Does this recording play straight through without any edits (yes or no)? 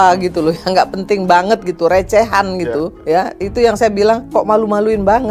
no